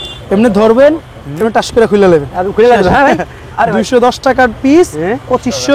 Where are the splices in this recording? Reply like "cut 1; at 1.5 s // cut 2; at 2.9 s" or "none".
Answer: none

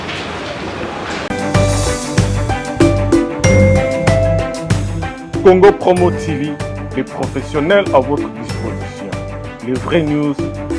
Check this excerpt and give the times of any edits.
cut 1; at 1.3 s

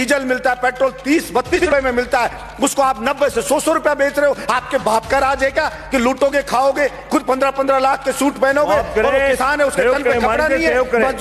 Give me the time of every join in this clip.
cut 1; at 1.6 s

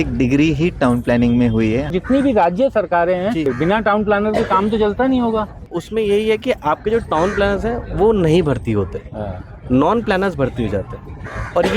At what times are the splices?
cut 1; at 1.9 s // cut 2; at 3.4 s // cut 3; at 5.7 s

